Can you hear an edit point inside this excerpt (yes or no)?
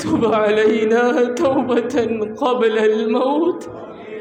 no